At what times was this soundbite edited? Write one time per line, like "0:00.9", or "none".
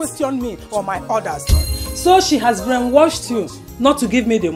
0:01.6